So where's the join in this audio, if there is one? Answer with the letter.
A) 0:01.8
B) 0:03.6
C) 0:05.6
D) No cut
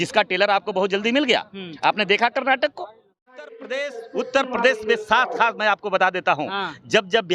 B